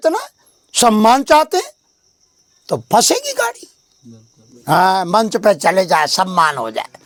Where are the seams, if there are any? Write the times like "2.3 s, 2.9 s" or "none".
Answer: none

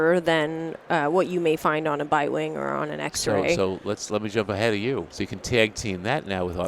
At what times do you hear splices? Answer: 5.2 s

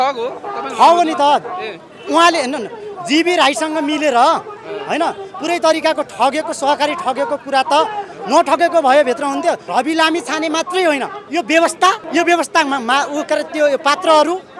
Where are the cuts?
9.6 s, 11.2 s, 12.0 s

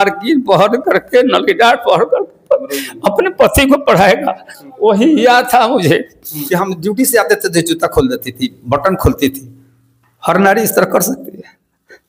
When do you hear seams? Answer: 6.3 s

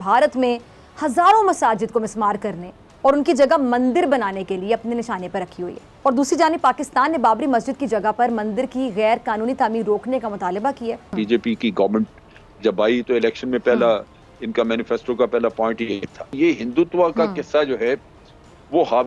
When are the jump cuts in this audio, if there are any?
5.8 s, 11.1 s, 16.3 s

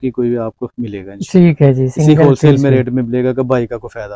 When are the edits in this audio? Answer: none

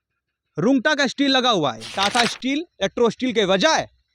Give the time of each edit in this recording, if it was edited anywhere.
1.8 s

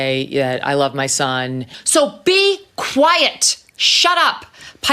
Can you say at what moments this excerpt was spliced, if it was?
1.8 s

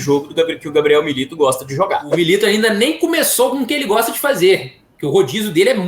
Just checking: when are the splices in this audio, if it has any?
2.1 s

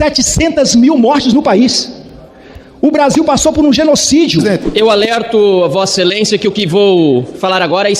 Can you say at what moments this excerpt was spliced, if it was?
4.6 s

